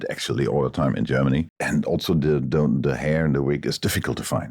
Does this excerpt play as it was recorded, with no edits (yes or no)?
no